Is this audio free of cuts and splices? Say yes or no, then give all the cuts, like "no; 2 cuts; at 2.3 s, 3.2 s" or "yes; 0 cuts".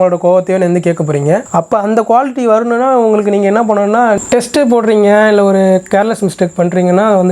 no; 2 cuts; at 1.5 s, 4.2 s